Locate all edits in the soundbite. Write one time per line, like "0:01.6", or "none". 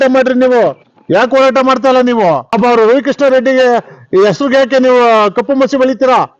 0:02.5